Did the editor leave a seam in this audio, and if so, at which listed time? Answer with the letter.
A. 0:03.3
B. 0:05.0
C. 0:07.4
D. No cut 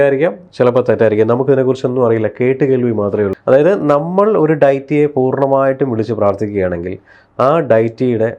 A